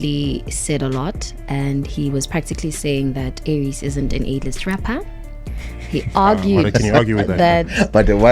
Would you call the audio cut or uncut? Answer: uncut